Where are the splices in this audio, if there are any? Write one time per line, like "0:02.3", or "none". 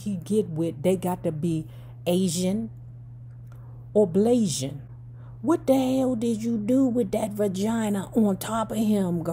none